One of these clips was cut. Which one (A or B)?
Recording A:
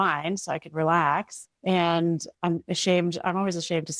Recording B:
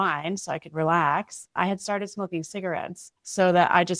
B